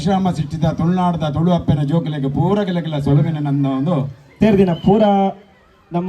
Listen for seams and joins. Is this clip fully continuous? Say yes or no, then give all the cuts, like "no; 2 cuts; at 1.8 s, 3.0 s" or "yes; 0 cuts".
no; 1 cut; at 4.2 s